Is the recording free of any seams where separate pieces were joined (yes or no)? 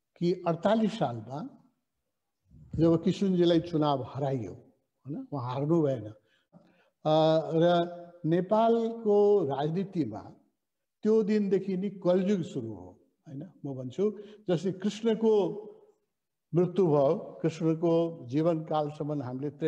no